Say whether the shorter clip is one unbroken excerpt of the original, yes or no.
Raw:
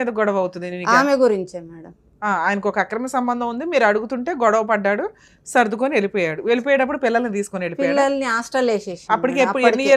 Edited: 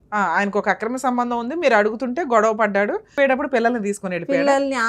no